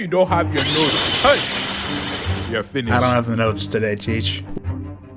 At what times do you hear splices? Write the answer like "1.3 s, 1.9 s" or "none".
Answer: 2.9 s